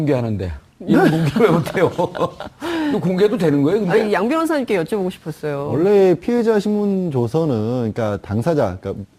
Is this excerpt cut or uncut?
uncut